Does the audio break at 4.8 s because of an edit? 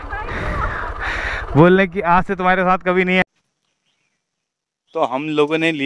no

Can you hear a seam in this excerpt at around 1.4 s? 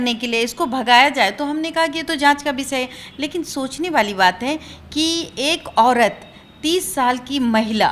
no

